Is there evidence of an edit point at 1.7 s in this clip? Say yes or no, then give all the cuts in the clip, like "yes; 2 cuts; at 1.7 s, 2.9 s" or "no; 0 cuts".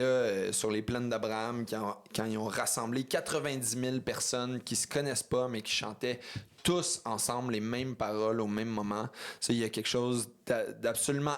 no; 0 cuts